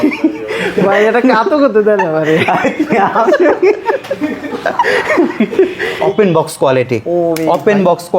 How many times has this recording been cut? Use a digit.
1